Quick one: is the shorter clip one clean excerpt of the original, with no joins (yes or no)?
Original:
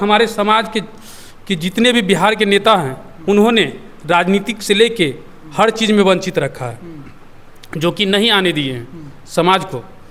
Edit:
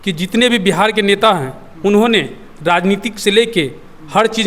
yes